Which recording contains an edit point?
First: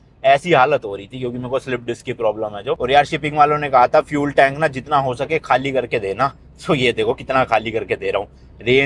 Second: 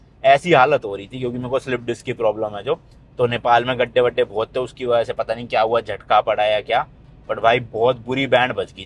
first; 1 cut; at 2.8 s

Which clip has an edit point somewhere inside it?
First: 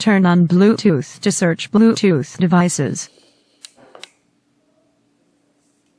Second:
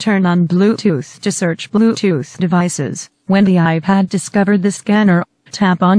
second; 1 cut; at 3.1 s

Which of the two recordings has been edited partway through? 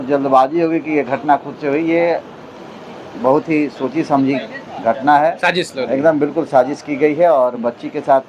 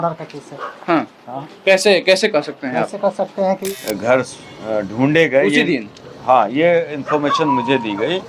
second; 1 cut; at 3.6 s

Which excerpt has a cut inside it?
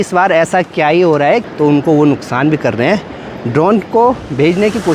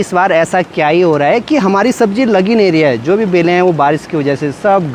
first; 1 cut; at 1.4 s

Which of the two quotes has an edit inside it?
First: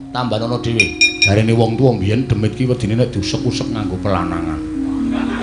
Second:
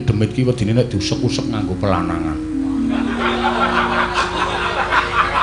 first; 1 cut; at 1.1 s

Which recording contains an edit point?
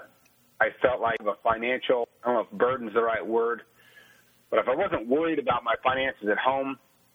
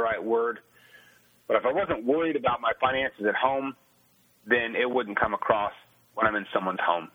first; 2 cuts; at 1.2 s, 2.0 s

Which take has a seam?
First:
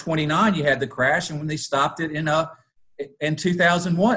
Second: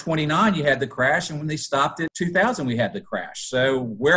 second; 1 cut; at 2.1 s

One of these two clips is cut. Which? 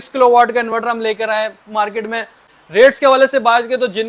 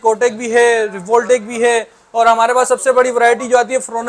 first; 1 cut; at 2.4 s

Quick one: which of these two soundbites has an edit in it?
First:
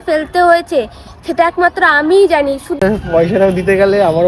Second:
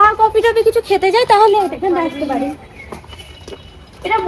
first; 1 cut; at 2.8 s

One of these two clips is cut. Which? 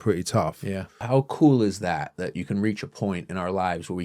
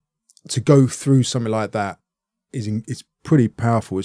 first; 1 cut; at 0.9 s

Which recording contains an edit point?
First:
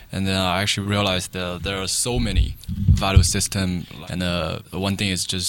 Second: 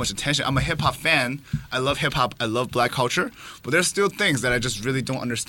first; 3 cuts; at 2.6 s, 3.9 s, 4.6 s

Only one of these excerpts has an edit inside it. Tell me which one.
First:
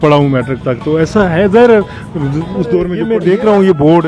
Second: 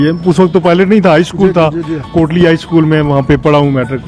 first; 1 cut; at 3.0 s

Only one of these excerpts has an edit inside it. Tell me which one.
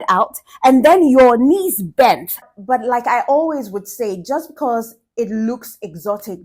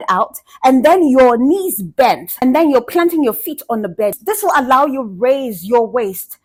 first; 1 cut; at 2.3 s

